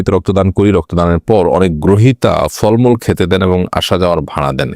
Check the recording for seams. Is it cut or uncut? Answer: uncut